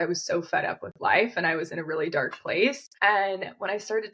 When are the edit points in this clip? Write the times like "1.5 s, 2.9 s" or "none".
2.9 s